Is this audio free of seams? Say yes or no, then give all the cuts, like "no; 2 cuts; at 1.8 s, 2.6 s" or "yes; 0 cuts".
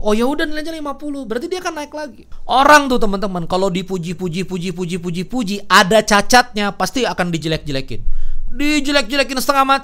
no; 1 cut; at 2.3 s